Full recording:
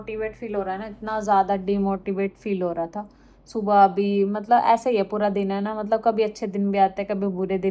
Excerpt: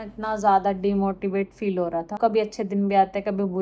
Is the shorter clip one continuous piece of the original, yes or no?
no